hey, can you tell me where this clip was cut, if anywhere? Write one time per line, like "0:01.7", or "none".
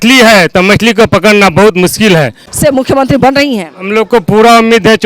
0:02.4